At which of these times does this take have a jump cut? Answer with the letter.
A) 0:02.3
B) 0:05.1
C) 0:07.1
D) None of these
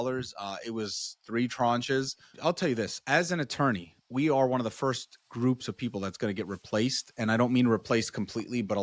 A